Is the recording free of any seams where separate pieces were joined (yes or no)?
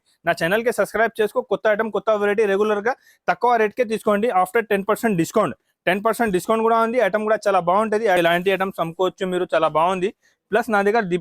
no